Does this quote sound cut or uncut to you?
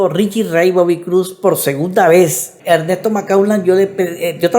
cut